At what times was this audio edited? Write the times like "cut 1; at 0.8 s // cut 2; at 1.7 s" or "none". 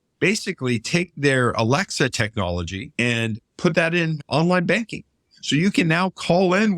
cut 1; at 2.8 s // cut 2; at 4.2 s